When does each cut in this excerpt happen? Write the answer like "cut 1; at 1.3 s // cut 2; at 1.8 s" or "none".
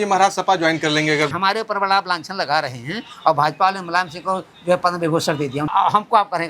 cut 1; at 1.3 s // cut 2; at 5.7 s